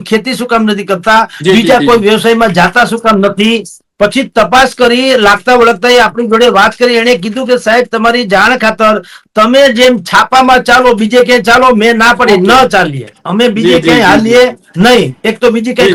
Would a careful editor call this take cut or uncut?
uncut